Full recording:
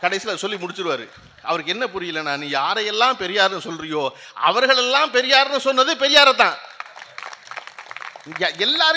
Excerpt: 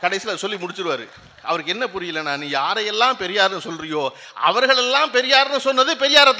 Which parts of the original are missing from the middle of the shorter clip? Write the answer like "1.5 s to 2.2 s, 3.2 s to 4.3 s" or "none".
none